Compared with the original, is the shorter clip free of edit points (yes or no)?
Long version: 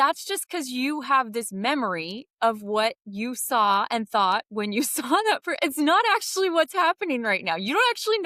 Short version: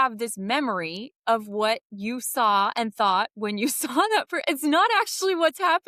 yes